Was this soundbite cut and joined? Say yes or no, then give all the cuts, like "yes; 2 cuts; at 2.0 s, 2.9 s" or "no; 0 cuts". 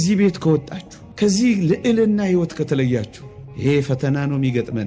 no; 0 cuts